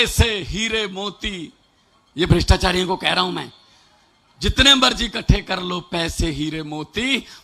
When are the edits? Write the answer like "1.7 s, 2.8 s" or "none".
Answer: none